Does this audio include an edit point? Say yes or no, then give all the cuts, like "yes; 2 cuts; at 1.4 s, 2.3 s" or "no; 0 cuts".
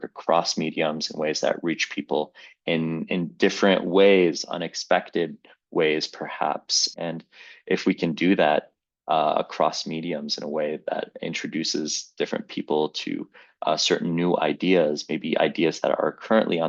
yes; 1 cut; at 6.8 s